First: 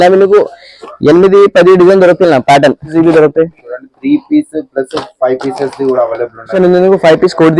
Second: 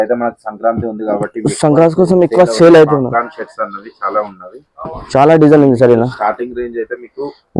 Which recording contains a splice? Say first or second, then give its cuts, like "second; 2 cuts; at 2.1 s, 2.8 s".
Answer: first; 2 cuts; at 2.9 s, 6.5 s